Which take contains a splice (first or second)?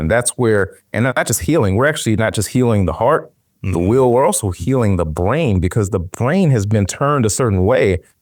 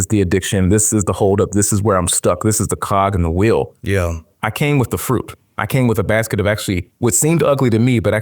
second